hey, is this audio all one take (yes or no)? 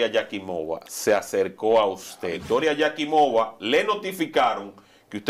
no